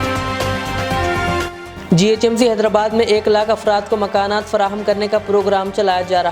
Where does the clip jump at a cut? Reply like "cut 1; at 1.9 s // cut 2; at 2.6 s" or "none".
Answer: cut 1; at 1.6 s